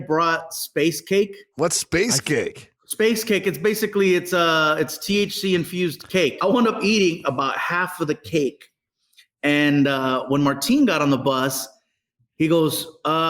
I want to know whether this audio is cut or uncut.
cut